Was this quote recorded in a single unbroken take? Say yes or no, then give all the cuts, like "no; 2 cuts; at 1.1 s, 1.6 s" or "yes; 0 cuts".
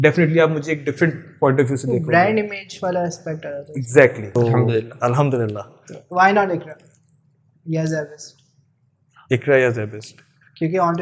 no; 1 cut; at 4.2 s